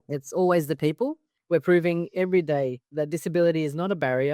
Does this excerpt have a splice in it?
yes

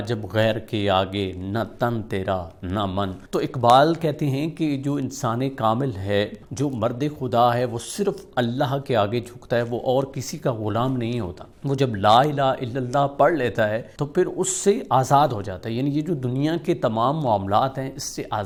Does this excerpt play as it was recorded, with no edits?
yes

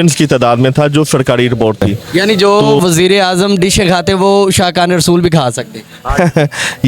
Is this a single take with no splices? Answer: no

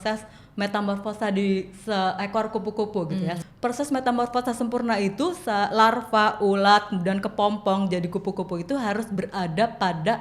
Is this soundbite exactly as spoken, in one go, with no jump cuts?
no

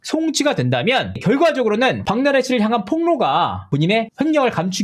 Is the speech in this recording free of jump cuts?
no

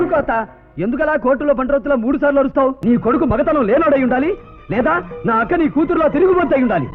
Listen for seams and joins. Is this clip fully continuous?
no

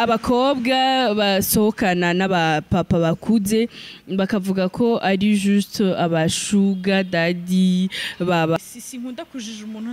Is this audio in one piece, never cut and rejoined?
no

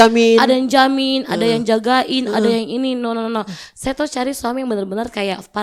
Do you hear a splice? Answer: no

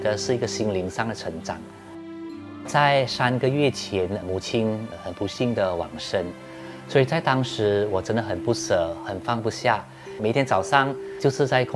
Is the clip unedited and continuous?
yes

